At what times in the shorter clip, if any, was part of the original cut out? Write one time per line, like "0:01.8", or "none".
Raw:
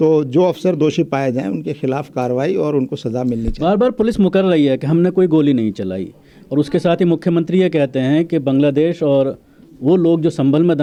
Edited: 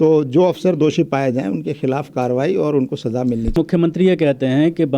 0:03.6